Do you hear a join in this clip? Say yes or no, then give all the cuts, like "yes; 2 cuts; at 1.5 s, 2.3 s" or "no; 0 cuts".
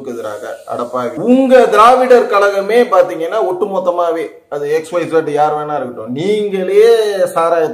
yes; 1 cut; at 1.1 s